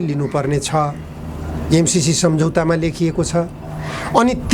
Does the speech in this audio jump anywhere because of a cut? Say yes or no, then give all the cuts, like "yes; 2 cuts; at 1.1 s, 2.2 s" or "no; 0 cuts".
no; 0 cuts